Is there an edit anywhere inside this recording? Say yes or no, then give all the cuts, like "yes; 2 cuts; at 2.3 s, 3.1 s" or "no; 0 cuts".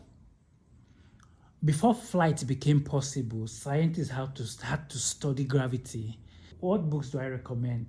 yes; 1 cut; at 6.5 s